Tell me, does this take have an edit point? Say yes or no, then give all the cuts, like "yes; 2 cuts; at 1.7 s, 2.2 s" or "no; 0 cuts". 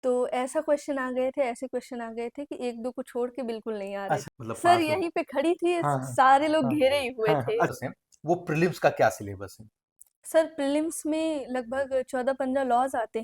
yes; 2 cuts; at 4.2 s, 7.7 s